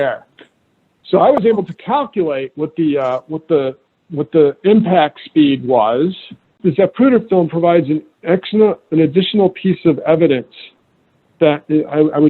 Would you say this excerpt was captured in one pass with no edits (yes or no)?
no